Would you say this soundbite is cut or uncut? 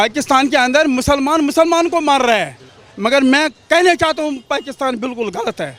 uncut